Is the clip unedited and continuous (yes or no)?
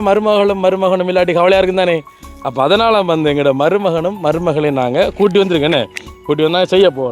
yes